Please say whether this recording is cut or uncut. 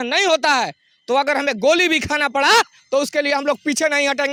uncut